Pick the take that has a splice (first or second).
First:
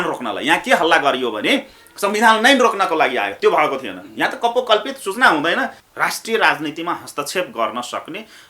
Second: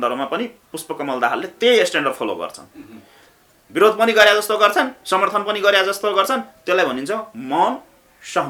first